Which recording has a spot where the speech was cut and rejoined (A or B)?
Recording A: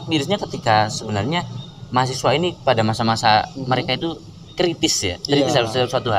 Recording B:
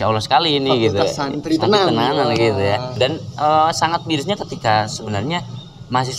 B